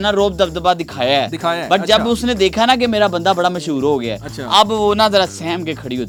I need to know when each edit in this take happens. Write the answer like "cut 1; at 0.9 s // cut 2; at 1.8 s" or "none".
none